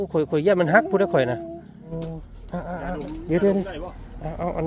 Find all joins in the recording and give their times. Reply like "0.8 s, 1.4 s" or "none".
1.9 s